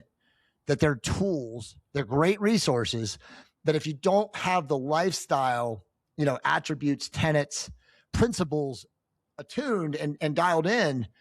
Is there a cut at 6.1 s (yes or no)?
no